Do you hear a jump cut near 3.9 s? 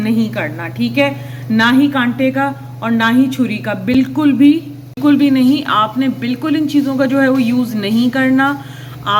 no; 0 cuts

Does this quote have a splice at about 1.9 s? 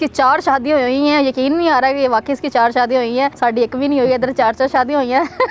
no; 1 cut; at 3.3 s

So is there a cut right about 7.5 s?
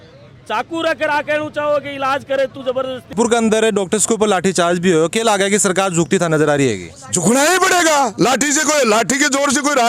no; 1 cut; at 3.1 s

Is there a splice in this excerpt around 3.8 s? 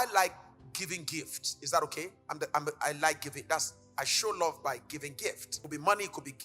no; 2 cuts; at 2.2 s, 5.5 s

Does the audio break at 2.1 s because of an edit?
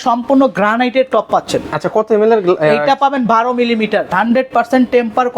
no; 1 cut; at 4.1 s

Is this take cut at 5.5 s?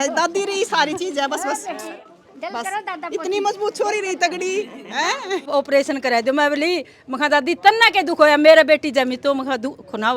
yes; 1 cut; at 5.5 s

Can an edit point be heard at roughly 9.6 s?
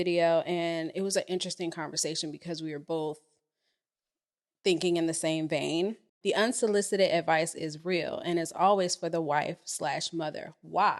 no; 1 cut; at 6.1 s

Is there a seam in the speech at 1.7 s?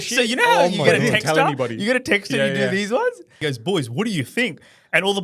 no; 1 cut; at 3.4 s

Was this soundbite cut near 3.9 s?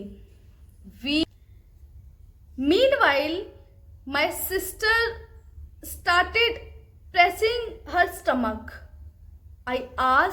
no; 1 cut; at 1.2 s

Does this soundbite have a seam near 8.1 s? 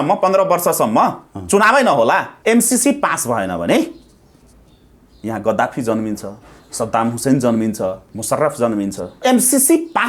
yes; 3 cuts; at 2.3 s, 8.1 s, 9.2 s

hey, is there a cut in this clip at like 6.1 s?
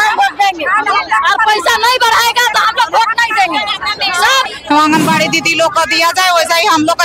no; 1 cut; at 4.5 s

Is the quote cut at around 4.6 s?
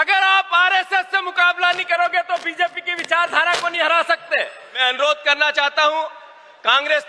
yes; 1 cut; at 4.6 s

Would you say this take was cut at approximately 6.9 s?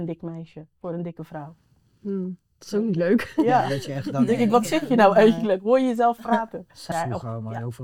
yes; 1 cut; at 6.9 s

